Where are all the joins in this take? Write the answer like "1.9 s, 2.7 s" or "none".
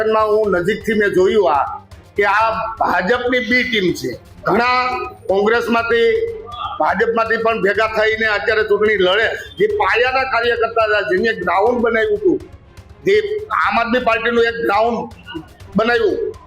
4.3 s, 9.4 s